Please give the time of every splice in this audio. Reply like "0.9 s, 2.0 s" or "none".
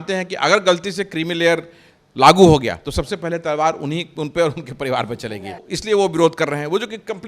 5.7 s